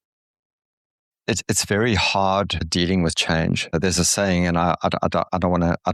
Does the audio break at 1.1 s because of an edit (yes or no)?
no